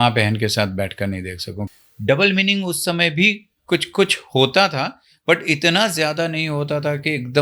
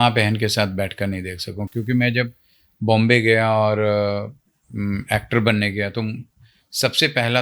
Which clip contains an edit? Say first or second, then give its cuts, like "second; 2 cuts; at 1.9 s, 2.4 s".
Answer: first; 1 cut; at 1.7 s